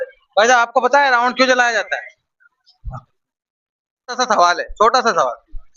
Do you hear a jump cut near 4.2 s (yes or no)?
yes